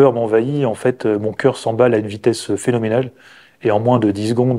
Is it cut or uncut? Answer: uncut